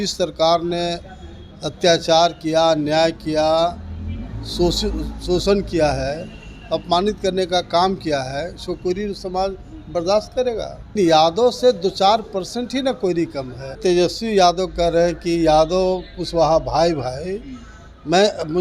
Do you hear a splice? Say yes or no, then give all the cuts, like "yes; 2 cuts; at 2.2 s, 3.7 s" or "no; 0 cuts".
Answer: yes; 2 cuts; at 10.9 s, 13.8 s